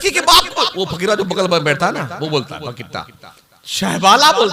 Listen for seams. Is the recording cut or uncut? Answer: uncut